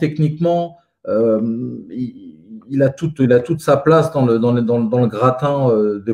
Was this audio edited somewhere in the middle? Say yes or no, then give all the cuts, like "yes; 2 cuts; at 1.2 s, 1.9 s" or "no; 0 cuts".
no; 0 cuts